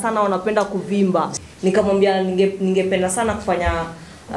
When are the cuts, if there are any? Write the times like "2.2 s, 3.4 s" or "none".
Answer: 1.3 s